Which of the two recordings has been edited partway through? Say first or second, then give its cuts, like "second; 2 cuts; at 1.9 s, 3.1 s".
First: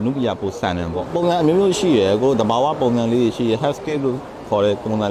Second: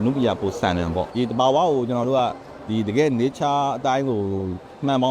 second; 1 cut; at 1.0 s